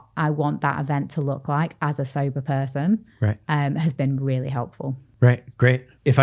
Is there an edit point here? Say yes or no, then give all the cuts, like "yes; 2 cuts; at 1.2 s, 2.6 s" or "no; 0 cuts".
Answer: no; 0 cuts